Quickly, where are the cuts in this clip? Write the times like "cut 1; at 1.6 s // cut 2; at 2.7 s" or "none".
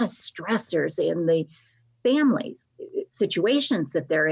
none

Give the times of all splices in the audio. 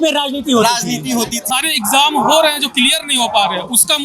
cut 1; at 1.4 s

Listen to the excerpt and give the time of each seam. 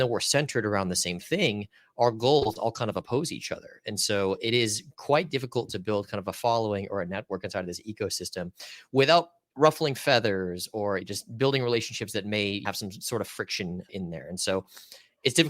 cut 1; at 9.4 s // cut 2; at 11.1 s // cut 3; at 12.6 s // cut 4; at 13.9 s

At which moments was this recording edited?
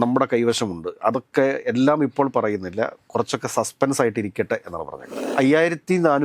cut 1; at 5.2 s

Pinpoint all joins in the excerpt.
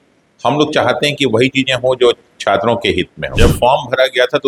cut 1; at 3.4 s

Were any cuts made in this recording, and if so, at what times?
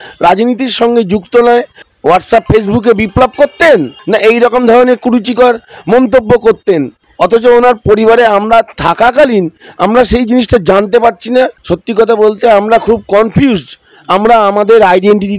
cut 1; at 1.8 s // cut 2; at 4.0 s // cut 3; at 7.0 s // cut 4; at 11.6 s

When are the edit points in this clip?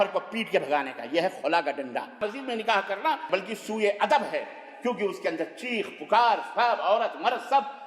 cut 1; at 2.2 s // cut 2; at 3.2 s

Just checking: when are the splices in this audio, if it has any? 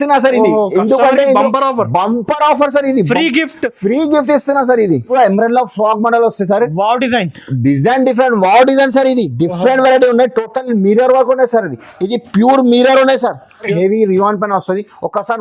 cut 1; at 5.0 s // cut 2; at 13.7 s

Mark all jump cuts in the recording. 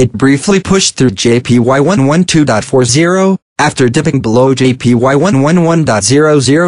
none

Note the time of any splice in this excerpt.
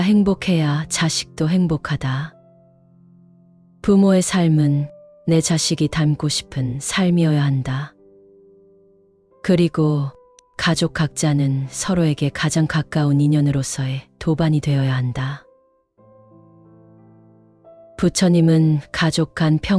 none

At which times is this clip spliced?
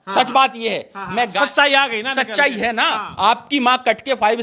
cut 1; at 3.1 s

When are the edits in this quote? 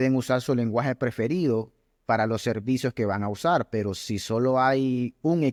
none

